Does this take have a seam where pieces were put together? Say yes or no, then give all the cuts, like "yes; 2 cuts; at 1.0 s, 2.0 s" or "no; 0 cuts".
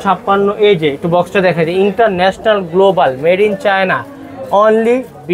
no; 0 cuts